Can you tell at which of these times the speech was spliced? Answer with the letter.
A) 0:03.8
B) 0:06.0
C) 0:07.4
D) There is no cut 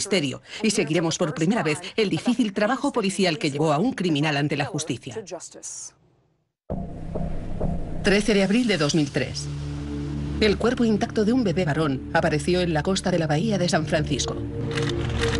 A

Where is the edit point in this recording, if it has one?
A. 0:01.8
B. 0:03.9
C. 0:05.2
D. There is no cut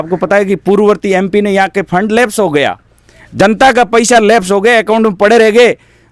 D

